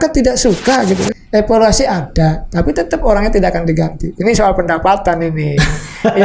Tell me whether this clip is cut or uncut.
cut